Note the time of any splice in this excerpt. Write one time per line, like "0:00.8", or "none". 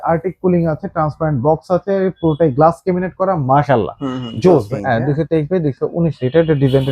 0:04.7